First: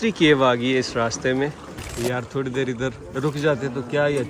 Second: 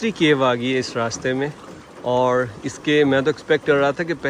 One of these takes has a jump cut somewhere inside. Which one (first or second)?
first